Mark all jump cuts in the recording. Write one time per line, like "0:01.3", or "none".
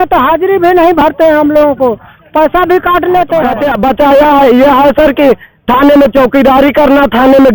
0:03.5